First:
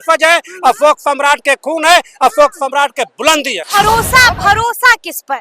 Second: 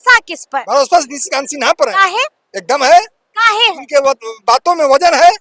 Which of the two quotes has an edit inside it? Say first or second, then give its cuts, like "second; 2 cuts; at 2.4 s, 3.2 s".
first; 1 cut; at 3.6 s